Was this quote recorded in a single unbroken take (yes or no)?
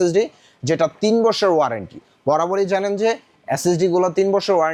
yes